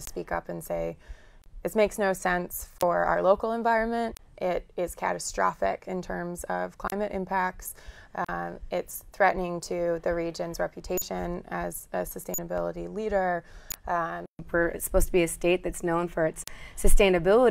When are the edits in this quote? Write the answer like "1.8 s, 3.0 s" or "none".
14.4 s